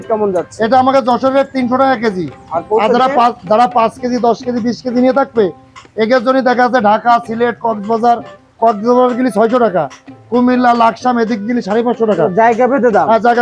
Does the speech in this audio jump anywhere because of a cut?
no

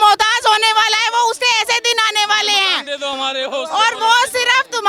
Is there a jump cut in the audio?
no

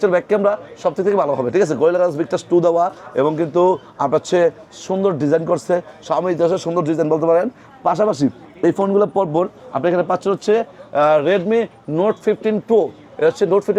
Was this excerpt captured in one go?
yes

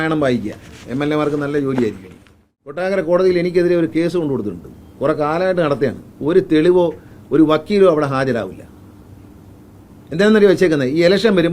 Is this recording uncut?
no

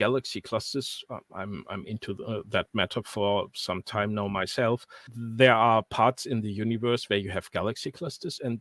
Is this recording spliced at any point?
no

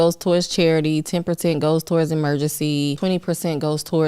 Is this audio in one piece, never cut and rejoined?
no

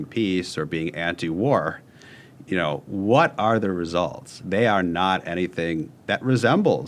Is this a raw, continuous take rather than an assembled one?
yes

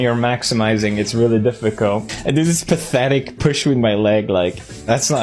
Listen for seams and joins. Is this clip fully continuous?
no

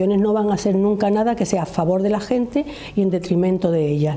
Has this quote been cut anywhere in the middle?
no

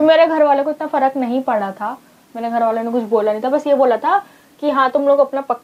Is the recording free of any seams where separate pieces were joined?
yes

